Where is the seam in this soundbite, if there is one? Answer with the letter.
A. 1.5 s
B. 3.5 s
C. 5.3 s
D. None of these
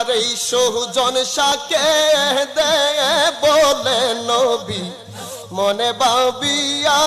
A